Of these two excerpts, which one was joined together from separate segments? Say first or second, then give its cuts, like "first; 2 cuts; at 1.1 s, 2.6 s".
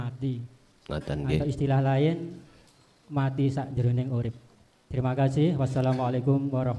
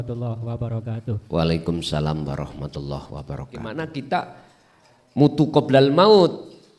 second; 1 cut; at 3.7 s